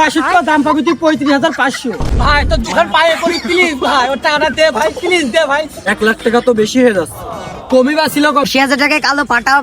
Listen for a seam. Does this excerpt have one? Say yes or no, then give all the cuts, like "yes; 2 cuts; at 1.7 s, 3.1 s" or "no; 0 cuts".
yes; 3 cuts; at 2.1 s, 5.8 s, 8.5 s